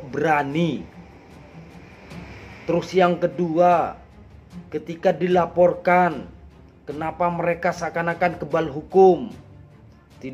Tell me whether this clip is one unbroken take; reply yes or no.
yes